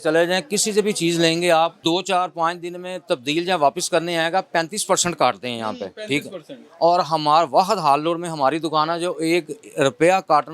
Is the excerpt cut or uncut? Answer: cut